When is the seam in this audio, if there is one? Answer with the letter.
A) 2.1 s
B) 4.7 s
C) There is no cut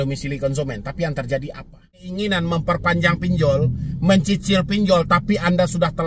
A